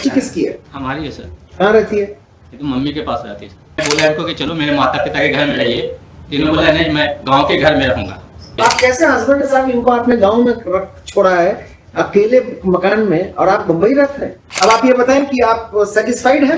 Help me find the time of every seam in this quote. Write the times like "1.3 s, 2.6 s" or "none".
3.8 s, 8.5 s, 14.4 s